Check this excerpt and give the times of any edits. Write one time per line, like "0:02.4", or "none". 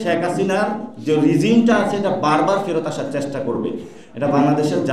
0:03.9